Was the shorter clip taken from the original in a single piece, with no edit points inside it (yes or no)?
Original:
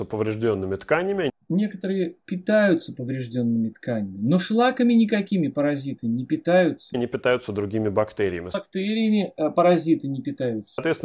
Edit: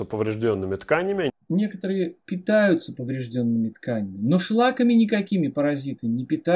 yes